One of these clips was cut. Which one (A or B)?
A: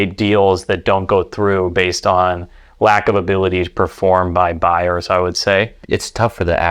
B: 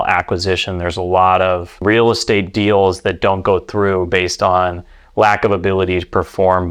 A